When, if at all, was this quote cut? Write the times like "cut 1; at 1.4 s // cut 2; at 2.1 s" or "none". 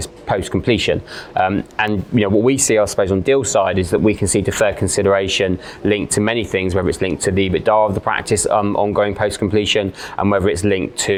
none